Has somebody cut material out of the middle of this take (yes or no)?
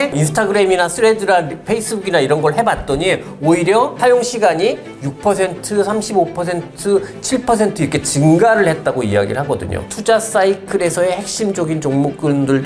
yes